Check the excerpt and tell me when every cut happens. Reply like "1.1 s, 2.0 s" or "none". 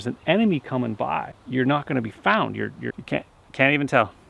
1.4 s, 2.9 s